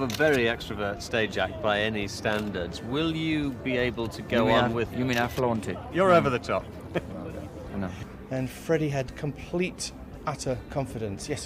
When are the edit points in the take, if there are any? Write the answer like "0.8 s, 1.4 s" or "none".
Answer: 8.1 s